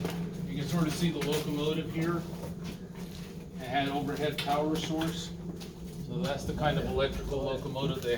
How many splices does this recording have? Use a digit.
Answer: 0